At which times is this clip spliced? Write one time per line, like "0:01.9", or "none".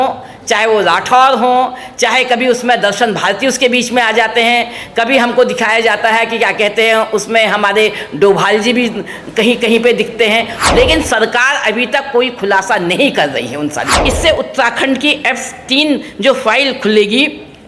0:10.5
0:14.0